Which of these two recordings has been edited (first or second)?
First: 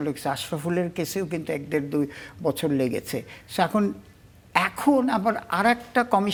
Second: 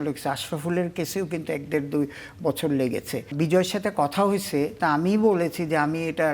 second